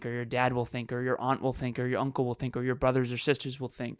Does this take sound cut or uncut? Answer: uncut